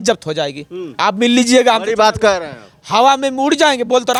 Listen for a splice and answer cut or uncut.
uncut